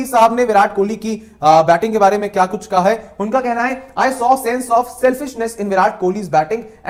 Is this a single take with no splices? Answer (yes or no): yes